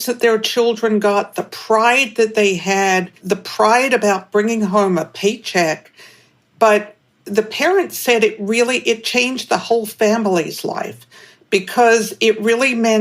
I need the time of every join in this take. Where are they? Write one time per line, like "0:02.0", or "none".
0:03.1